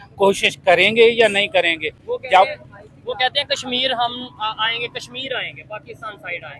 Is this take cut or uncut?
uncut